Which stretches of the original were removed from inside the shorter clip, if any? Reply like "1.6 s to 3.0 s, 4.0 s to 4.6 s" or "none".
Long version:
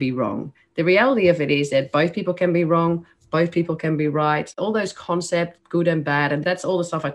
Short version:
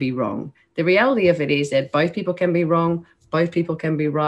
none

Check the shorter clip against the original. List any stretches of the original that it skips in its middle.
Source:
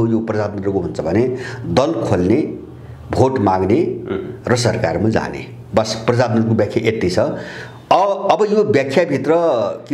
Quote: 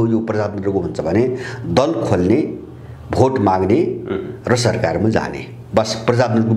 none

